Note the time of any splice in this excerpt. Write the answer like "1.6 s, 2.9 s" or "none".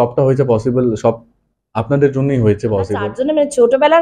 3.1 s